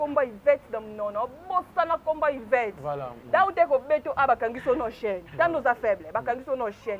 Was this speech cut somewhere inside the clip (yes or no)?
no